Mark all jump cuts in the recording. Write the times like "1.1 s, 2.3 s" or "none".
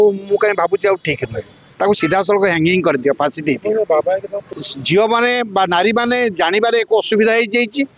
4.4 s